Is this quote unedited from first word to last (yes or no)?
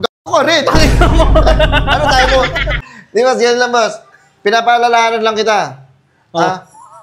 no